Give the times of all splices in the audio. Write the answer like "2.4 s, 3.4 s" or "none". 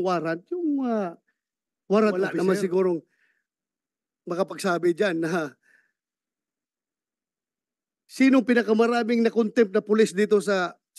2.3 s